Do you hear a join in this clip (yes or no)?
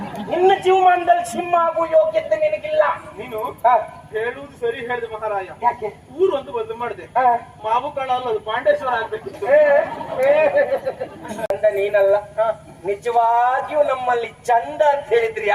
yes